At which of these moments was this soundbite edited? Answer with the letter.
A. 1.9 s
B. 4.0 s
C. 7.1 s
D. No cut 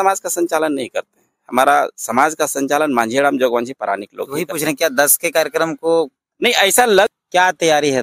C